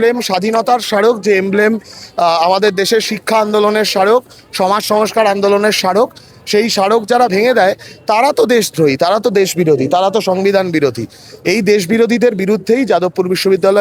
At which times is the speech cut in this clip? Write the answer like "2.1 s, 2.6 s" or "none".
none